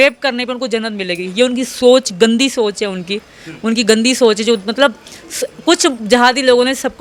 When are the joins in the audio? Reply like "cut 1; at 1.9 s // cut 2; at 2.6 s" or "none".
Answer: none